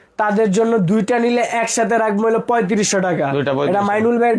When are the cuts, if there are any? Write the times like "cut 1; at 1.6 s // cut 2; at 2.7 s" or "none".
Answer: none